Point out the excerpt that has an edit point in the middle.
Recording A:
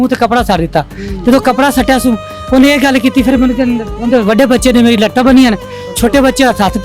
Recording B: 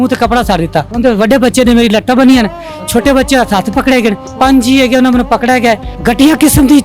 B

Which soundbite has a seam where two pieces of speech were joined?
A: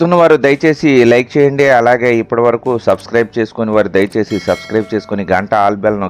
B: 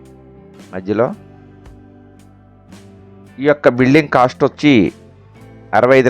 B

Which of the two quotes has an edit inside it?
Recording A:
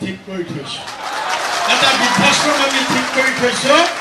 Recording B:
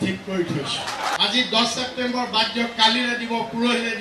B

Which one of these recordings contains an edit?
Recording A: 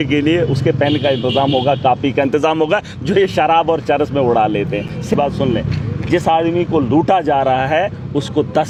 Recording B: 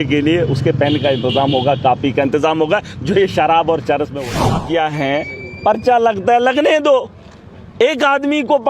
B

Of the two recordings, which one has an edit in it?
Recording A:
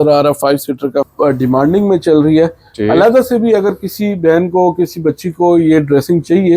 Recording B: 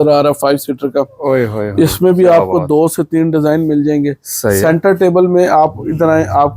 A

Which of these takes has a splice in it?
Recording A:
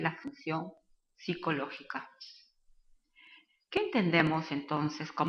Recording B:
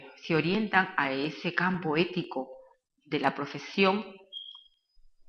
A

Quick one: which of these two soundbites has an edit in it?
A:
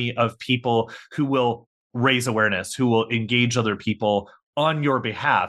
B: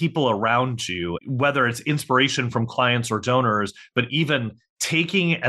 B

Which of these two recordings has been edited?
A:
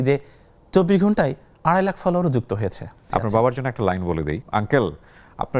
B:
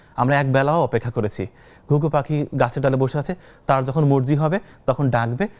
A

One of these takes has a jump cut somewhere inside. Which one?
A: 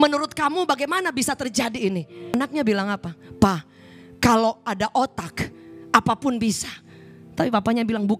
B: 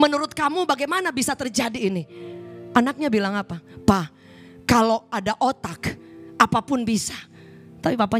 A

